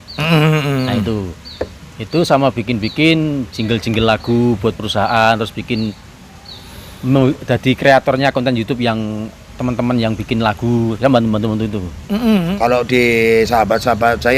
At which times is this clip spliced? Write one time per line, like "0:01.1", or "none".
0:12.5